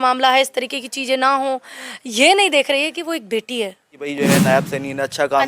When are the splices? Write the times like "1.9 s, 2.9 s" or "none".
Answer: 4.1 s